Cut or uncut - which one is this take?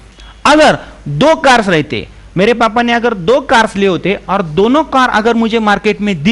uncut